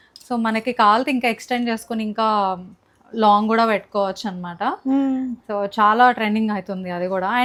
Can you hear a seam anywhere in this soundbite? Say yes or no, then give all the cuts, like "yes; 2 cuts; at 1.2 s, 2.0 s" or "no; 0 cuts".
no; 0 cuts